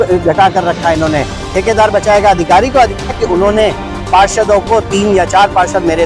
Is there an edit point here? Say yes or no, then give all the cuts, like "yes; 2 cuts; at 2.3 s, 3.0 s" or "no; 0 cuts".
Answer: yes; 1 cut; at 3.1 s